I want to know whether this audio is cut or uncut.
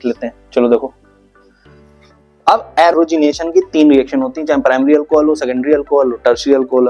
cut